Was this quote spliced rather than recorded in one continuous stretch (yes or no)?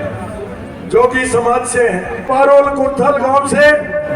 yes